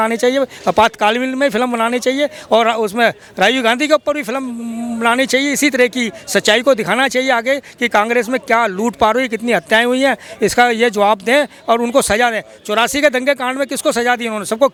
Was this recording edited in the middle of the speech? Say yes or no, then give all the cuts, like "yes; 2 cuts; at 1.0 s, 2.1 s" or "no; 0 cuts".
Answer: no; 0 cuts